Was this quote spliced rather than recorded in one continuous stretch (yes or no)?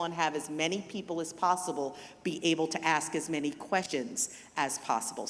yes